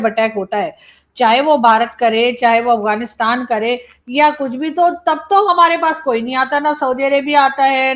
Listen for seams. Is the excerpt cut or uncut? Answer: uncut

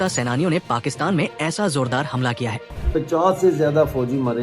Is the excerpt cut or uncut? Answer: cut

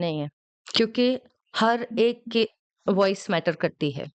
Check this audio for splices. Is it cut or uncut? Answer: uncut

